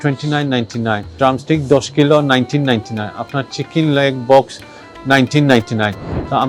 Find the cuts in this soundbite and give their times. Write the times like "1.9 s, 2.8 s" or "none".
1.1 s